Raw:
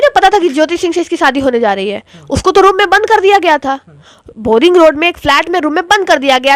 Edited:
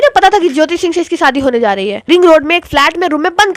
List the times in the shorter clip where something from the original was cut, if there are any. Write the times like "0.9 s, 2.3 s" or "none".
2.1 s